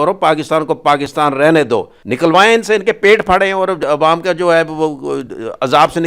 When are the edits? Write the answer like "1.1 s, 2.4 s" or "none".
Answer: 2.0 s